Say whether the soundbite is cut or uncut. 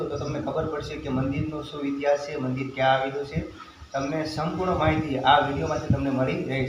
uncut